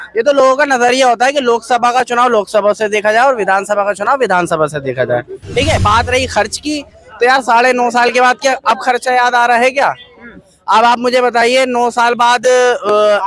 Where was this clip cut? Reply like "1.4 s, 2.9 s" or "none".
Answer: 5.8 s